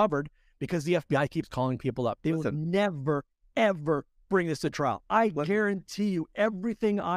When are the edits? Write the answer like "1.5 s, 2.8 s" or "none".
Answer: 2.2 s